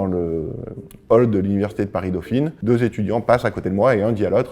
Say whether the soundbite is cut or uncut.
cut